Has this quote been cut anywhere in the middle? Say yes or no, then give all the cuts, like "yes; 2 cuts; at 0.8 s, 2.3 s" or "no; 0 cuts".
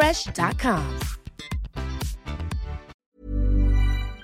yes; 1 cut; at 2.9 s